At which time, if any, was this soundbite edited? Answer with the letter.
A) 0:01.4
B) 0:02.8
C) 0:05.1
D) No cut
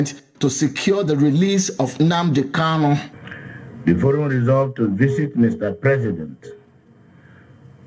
D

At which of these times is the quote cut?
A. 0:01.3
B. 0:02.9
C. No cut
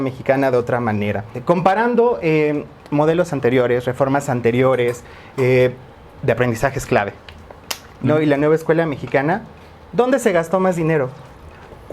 A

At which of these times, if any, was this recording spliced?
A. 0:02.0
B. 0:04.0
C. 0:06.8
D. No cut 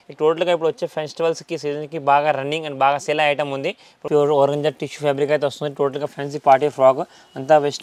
B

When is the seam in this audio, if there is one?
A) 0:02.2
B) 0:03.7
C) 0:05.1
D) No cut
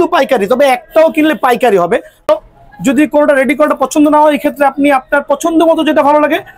A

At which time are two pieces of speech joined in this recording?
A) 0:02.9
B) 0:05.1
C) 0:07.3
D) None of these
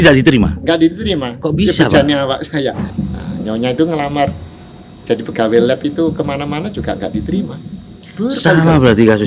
A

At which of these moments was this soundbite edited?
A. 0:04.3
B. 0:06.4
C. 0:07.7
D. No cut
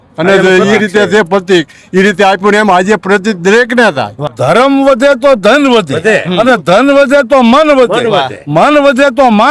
A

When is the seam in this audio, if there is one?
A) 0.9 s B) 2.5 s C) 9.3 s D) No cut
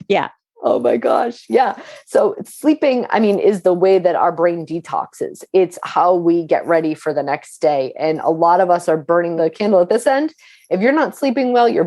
C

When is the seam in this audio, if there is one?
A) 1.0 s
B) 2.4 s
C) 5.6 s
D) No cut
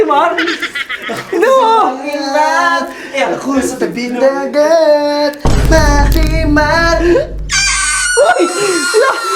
D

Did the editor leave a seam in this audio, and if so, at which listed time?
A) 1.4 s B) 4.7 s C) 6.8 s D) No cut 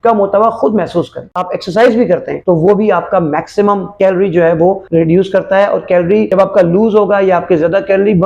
A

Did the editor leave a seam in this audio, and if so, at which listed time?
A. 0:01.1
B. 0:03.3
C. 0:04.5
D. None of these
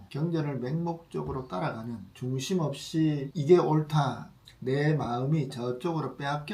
B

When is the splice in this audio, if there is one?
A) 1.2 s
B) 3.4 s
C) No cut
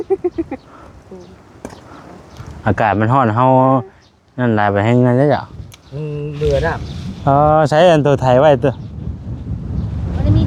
C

